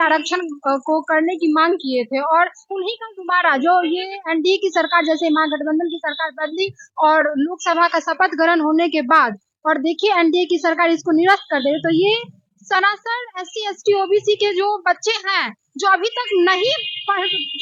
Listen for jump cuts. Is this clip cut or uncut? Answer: uncut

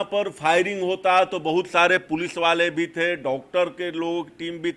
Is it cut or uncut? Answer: uncut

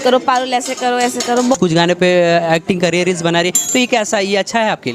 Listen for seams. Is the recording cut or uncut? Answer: cut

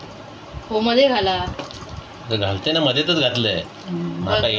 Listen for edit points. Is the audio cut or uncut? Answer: uncut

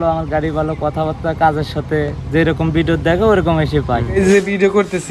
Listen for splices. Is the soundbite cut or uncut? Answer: cut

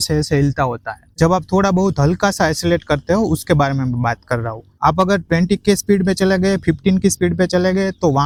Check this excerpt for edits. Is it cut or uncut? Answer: uncut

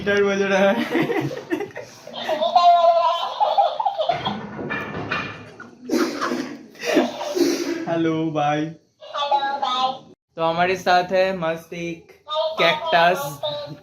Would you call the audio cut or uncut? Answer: cut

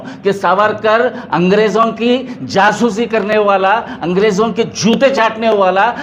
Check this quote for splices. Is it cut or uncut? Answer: uncut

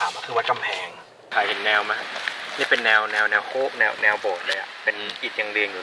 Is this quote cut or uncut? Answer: cut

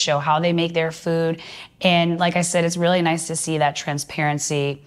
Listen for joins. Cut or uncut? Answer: uncut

